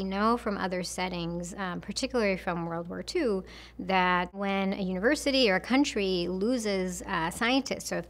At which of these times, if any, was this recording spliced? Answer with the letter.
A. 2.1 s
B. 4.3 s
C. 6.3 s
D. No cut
B